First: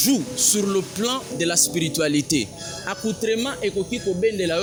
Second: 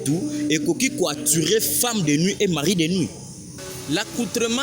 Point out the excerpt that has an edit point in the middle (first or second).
second